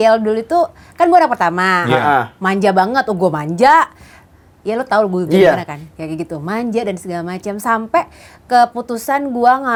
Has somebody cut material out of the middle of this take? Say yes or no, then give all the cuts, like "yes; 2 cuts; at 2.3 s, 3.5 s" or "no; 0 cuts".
no; 0 cuts